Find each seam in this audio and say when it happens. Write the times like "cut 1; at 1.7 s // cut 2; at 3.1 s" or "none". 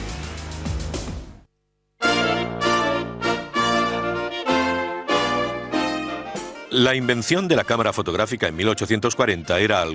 none